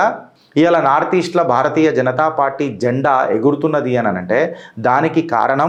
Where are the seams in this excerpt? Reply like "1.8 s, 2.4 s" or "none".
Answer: none